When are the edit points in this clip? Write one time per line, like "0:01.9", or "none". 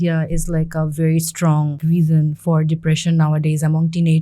0:01.8